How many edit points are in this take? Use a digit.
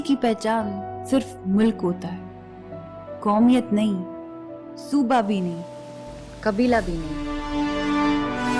0